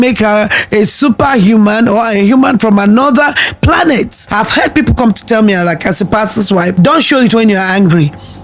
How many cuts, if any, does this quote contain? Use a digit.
2